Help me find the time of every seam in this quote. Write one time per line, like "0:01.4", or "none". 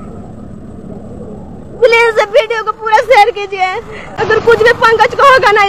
0:04.0